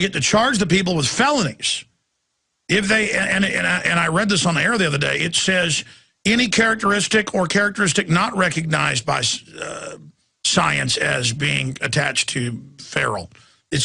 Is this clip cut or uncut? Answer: cut